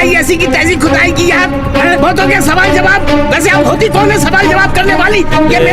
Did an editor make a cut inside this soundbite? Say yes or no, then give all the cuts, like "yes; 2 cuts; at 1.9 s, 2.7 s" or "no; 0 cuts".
no; 0 cuts